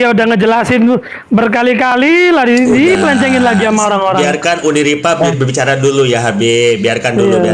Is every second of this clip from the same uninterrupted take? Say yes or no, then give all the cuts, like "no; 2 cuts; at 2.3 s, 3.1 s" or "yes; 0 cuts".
yes; 0 cuts